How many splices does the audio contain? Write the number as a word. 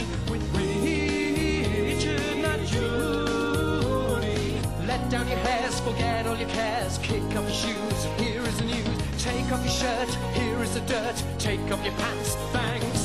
zero